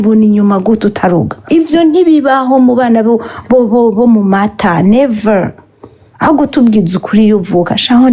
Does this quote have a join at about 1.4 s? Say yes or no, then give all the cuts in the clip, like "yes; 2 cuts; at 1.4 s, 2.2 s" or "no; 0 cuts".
yes; 1 cut; at 1.4 s